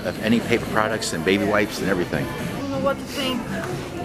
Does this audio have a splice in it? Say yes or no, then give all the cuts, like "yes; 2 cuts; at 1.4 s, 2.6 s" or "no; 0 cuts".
yes; 1 cut; at 2.5 s